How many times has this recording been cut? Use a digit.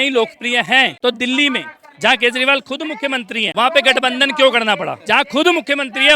1